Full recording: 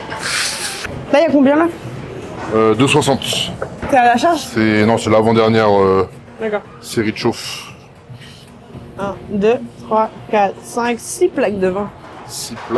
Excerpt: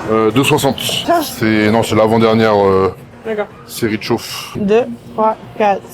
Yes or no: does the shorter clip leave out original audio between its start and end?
yes